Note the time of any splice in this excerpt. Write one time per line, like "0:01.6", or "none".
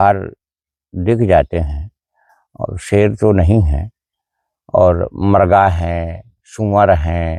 none